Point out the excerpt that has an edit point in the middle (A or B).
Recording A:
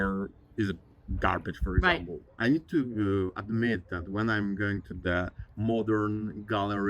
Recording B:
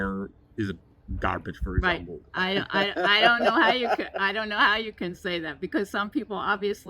A